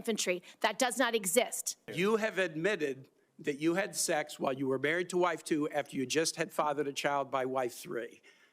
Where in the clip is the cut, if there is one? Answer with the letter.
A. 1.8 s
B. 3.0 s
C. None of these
A